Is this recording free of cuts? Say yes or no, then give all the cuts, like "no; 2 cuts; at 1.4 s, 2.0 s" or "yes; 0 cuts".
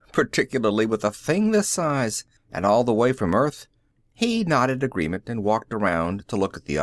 no; 1 cut; at 2.1 s